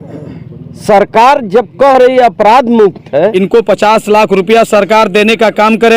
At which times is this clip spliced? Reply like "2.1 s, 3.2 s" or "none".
3.3 s